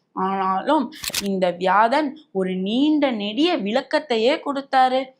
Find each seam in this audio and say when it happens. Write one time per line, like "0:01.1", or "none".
0:01.1